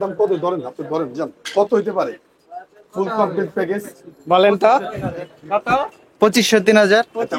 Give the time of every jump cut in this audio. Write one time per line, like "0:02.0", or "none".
none